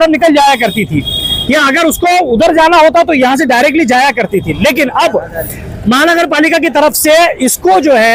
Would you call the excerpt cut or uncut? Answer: uncut